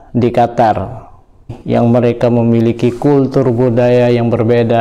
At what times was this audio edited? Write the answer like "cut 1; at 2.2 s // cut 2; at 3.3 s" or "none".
cut 1; at 1.5 s